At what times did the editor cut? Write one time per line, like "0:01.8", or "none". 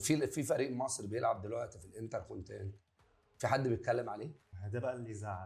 none